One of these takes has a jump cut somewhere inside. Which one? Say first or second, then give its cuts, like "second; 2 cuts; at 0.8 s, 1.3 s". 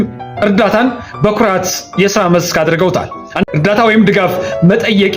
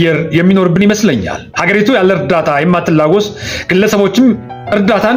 first; 1 cut; at 3.4 s